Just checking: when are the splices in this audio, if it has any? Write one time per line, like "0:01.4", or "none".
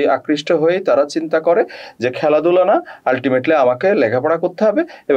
none